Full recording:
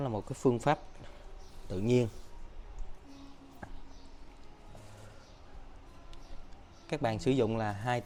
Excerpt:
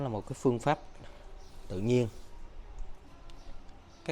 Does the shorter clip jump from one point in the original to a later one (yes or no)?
yes